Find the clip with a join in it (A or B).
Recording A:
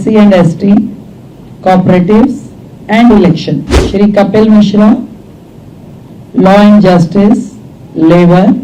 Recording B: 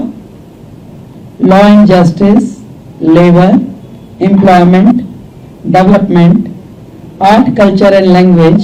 A